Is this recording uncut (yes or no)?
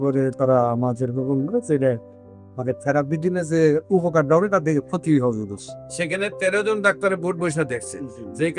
yes